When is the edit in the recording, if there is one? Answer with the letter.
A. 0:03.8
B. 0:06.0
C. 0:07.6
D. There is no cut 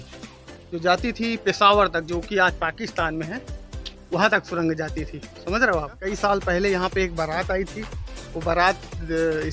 B